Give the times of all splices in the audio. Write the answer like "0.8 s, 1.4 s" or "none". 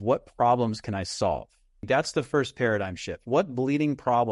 1.8 s